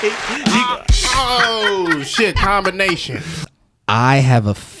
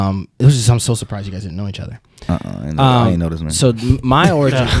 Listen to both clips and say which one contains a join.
first; 1 cut; at 3.5 s

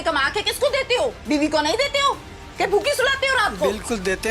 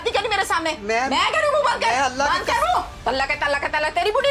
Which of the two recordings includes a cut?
first; 1 cut; at 1.2 s

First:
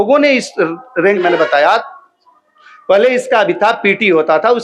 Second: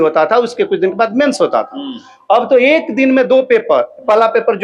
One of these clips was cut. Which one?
first; 1 cut; at 1.2 s

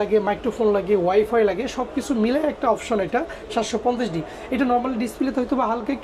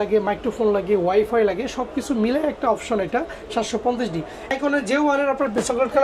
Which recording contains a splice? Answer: second; 1 cut; at 4.5 s

